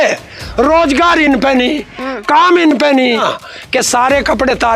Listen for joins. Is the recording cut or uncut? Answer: cut